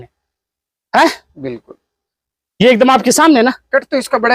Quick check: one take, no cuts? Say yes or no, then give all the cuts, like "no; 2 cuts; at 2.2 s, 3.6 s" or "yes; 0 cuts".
yes; 0 cuts